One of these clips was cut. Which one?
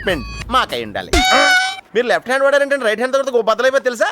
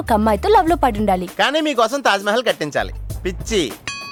first; 2 cuts; at 1.1 s, 1.8 s

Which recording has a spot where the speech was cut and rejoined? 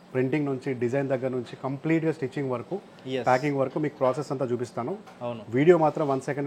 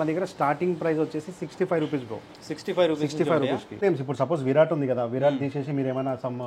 second; 1 cut; at 3.8 s

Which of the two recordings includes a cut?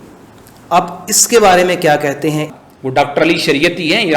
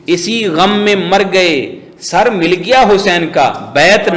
first; 1 cut; at 2.5 s

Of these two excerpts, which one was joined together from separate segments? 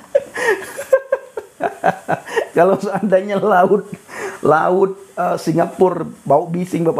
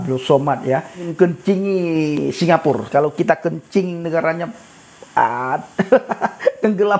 second; 2 cuts; at 1.0 s, 2.9 s

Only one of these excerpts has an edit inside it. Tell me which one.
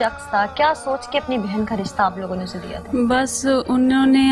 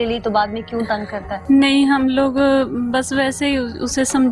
second; 1 cut; at 1.3 s

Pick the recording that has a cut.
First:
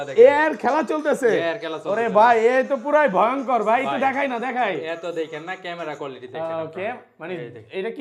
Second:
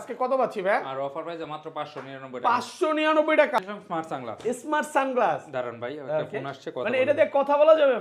second; 1 cut; at 3.6 s

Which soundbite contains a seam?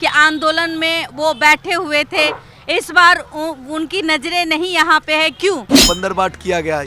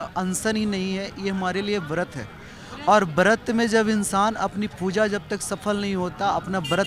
first; 1 cut; at 5.7 s

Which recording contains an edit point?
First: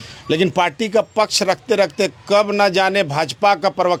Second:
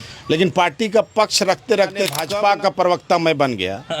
second; 1 cut; at 2.3 s

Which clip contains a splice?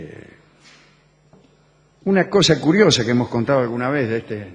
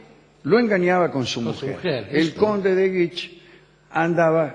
first; 1 cut; at 2.3 s

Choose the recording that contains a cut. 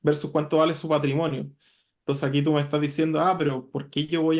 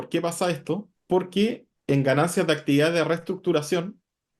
second; 2 cuts; at 0.9 s, 1.7 s

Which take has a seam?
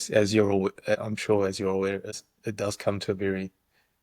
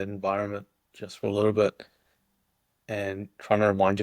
first; 2 cuts; at 1.0 s, 2.1 s

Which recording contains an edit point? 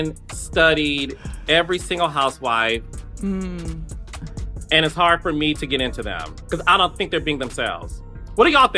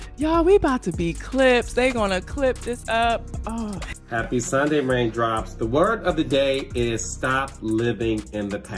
second; 1 cut; at 3.9 s

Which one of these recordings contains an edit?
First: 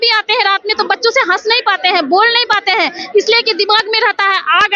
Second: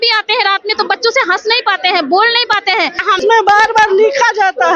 second; 1 cut; at 3.1 s

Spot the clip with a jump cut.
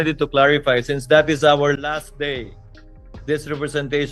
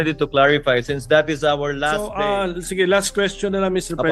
second; 1 cut; at 1.8 s

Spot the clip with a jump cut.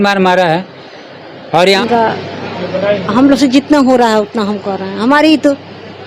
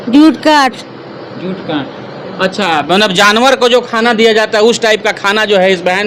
first; 1 cut; at 1.8 s

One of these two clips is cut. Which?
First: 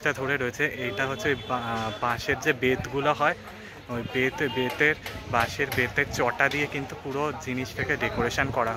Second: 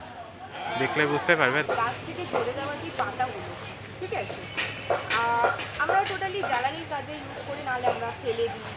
second; 1 cut; at 1.6 s

